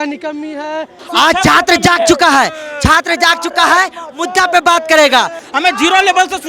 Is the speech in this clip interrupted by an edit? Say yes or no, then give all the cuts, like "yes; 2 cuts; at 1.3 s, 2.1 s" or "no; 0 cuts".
yes; 2 cuts; at 1.0 s, 5.4 s